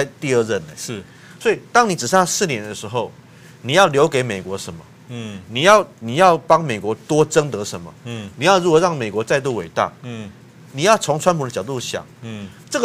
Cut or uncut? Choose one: uncut